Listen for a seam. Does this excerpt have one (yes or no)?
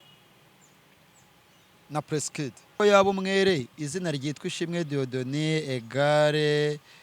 yes